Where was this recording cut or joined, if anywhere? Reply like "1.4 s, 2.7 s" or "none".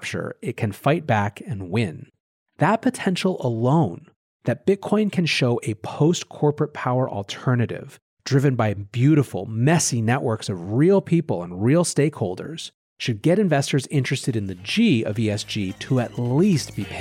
none